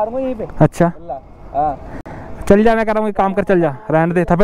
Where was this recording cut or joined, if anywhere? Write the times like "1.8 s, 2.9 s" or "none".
none